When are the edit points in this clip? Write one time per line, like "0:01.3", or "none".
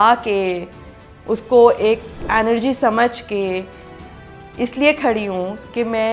0:02.1

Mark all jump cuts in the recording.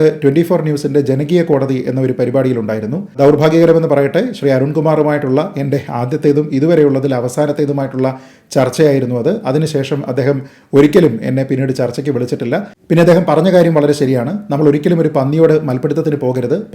0:03.2
0:12.7

